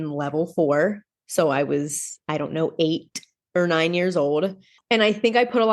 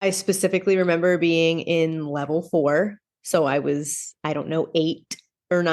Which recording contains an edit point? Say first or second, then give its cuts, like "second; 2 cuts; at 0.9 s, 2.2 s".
first; 1 cut; at 4.7 s